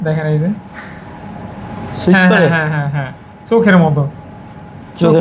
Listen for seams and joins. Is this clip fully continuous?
yes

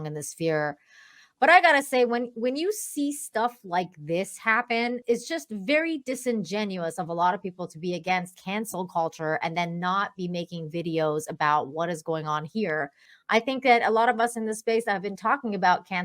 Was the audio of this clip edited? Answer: yes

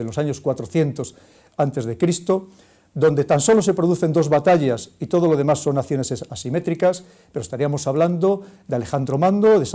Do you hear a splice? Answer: no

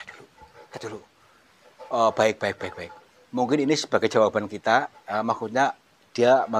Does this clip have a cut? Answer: no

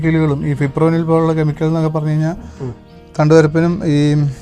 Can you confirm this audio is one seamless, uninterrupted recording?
yes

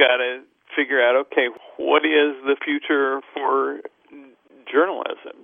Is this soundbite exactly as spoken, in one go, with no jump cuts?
no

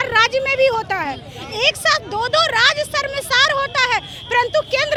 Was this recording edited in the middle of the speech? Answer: no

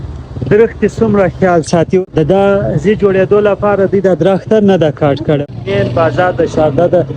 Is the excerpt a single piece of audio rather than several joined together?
no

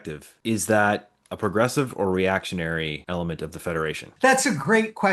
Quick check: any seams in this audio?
yes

